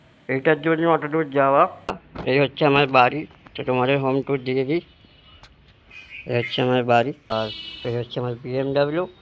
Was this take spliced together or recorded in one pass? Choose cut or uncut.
cut